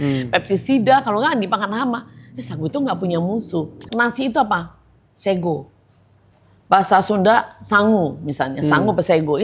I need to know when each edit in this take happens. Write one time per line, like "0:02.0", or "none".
0:03.8